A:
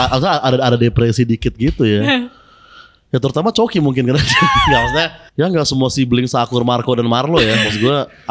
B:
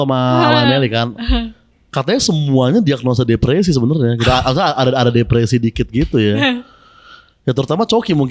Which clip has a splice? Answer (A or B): A